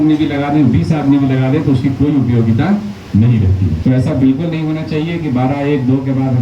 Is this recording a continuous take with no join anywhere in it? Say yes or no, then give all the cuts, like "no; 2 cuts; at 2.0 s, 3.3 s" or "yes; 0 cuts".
no; 1 cut; at 3.8 s